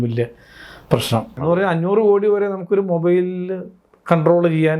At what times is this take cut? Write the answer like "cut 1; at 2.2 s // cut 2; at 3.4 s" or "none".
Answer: cut 1; at 1.3 s